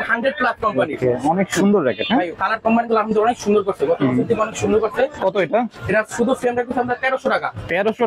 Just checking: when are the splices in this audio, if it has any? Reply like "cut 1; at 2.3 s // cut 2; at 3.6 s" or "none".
cut 1; at 5.1 s